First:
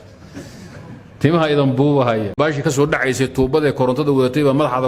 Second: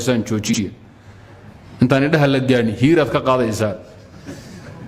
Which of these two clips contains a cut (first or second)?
first